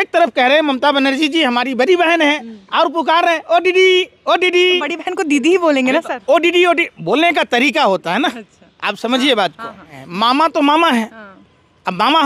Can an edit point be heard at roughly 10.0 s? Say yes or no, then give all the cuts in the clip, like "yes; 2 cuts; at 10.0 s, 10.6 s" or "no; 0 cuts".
yes; 1 cut; at 10.0 s